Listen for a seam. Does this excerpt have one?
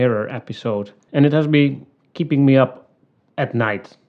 yes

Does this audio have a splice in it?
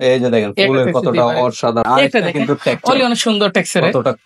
yes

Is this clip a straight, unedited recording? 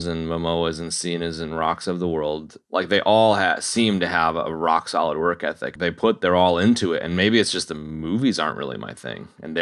no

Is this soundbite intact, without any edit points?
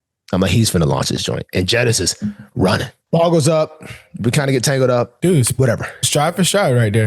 no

